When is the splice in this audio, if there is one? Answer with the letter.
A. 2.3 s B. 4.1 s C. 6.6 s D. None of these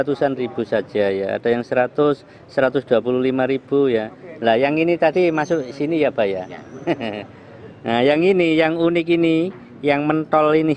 D